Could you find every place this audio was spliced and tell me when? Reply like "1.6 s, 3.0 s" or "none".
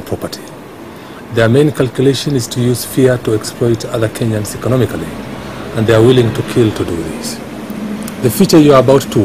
none